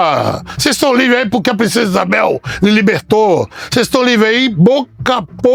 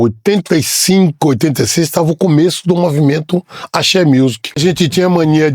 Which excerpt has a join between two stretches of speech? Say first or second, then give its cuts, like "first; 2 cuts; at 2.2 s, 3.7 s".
second; 1 cut; at 4.6 s